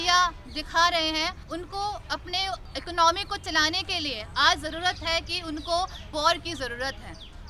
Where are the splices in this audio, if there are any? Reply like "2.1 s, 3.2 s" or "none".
1.5 s, 2.7 s, 6.1 s